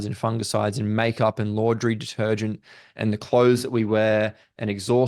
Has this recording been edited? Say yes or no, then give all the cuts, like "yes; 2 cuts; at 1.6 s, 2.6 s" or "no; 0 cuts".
no; 0 cuts